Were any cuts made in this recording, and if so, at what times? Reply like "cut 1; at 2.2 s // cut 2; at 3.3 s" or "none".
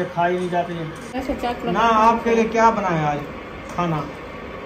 cut 1; at 1.1 s